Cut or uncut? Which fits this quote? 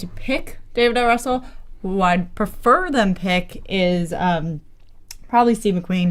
cut